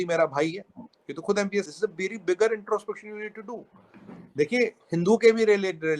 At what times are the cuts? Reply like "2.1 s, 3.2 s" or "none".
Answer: 1.7 s